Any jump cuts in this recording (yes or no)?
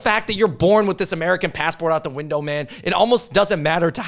no